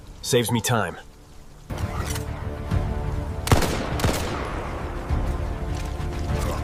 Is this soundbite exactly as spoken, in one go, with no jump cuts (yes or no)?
yes